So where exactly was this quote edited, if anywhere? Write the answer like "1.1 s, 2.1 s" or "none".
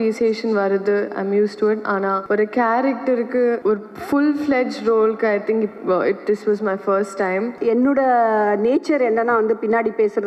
2.2 s, 3.6 s, 7.5 s